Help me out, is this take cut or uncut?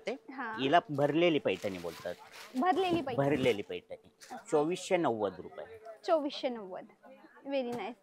uncut